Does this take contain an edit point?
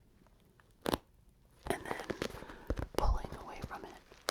no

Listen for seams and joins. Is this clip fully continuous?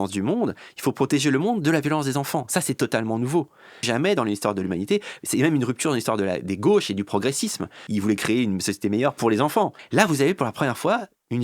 no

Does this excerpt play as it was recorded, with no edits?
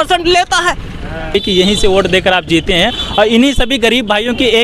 no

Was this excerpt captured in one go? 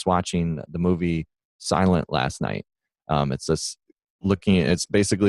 yes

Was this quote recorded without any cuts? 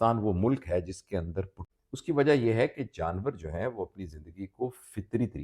no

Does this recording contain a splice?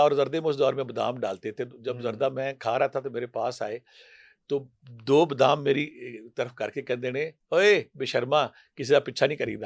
no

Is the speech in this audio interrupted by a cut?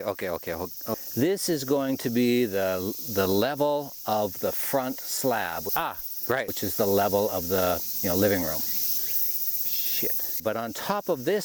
no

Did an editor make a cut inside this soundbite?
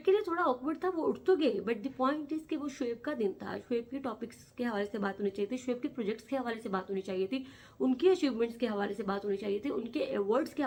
no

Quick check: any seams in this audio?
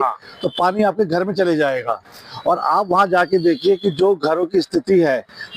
no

